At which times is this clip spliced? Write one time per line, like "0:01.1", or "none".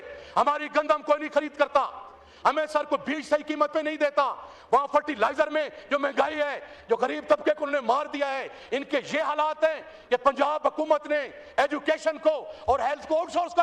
none